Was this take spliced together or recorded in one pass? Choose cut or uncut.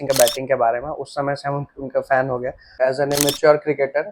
cut